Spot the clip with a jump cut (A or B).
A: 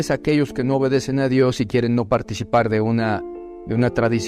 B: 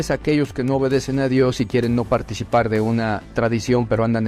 B